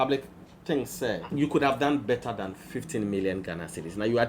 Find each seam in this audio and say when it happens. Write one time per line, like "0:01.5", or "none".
0:01.3